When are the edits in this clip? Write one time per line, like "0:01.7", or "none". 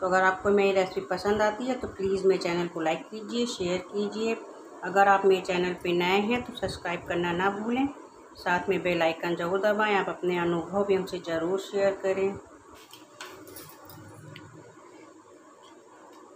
0:12.8